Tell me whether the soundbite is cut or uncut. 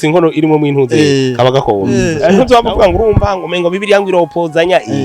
cut